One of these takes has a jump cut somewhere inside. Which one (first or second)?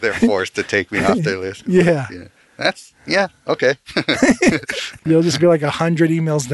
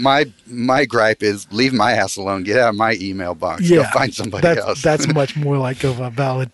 first